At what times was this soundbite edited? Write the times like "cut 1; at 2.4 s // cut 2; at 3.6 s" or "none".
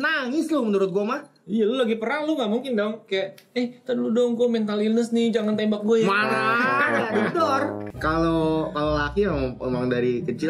cut 1; at 1.3 s // cut 2; at 7.9 s